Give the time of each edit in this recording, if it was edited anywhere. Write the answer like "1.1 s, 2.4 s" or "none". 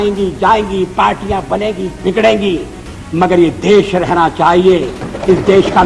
none